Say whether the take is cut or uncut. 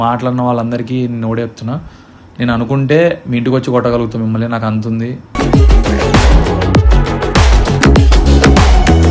uncut